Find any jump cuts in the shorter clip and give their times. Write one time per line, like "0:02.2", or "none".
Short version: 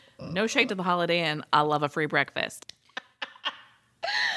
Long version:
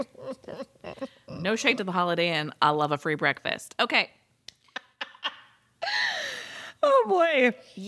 0:02.6